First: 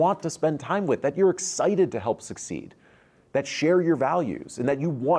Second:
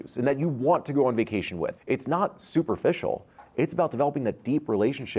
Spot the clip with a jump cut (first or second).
second